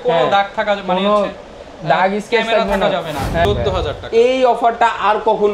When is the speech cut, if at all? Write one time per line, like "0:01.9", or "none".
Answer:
0:03.5

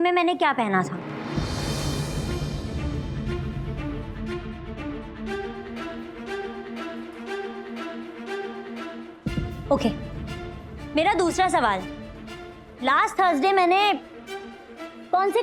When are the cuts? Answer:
none

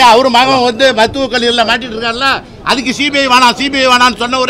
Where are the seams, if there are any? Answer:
none

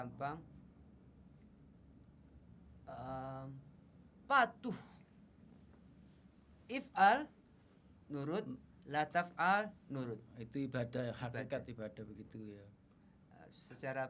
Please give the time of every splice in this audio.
none

